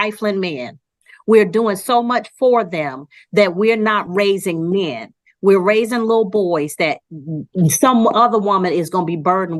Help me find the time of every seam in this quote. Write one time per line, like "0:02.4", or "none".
none